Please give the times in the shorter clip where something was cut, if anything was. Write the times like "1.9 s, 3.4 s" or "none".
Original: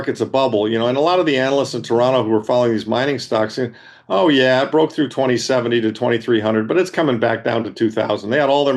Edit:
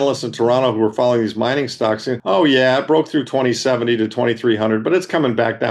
2.2 s